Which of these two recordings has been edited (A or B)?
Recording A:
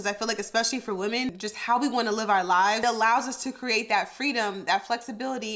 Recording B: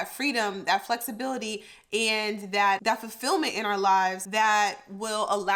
A